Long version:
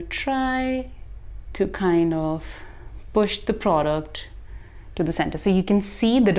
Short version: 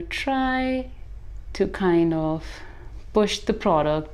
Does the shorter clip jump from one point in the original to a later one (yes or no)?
no